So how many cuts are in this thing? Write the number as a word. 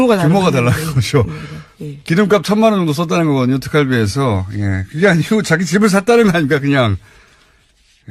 one